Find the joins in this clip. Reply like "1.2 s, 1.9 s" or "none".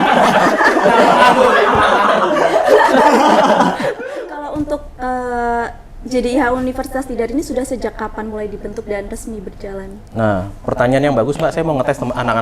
4.0 s